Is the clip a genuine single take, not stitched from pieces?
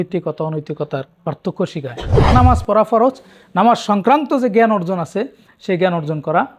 no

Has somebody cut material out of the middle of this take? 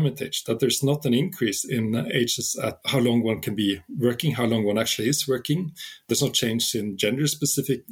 no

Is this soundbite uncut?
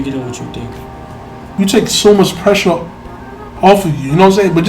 no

